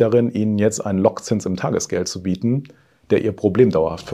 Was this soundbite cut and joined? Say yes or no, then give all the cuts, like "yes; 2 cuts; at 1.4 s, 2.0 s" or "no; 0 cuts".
no; 0 cuts